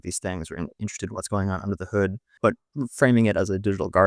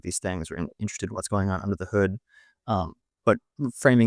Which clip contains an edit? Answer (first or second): first